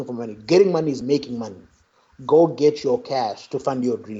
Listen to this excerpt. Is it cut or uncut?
uncut